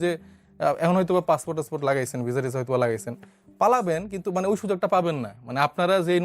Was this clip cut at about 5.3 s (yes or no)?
no